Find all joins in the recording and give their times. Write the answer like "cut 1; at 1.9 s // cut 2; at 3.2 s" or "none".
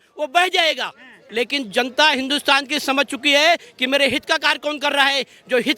cut 1; at 1.2 s